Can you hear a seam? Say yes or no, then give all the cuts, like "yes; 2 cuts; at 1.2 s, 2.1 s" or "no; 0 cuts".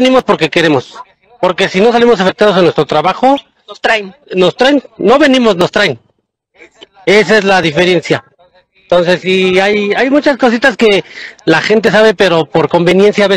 no; 0 cuts